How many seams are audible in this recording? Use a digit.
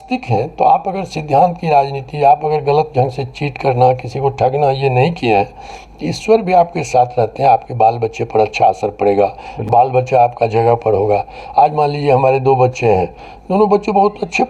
0